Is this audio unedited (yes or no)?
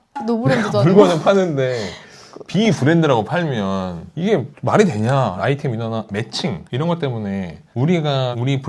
no